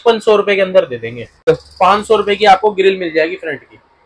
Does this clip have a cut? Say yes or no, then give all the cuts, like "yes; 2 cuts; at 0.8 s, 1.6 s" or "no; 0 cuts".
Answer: yes; 1 cut; at 1.5 s